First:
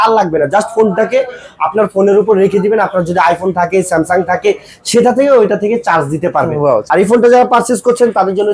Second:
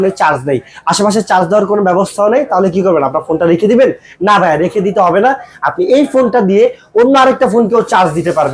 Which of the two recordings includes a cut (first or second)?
first